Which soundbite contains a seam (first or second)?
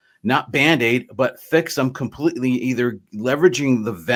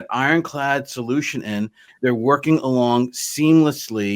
second